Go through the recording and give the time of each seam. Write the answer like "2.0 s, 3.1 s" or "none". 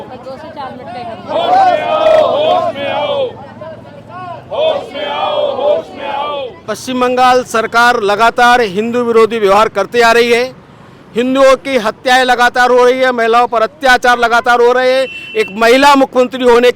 6.6 s